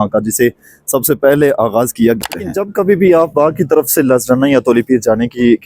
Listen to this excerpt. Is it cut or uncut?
cut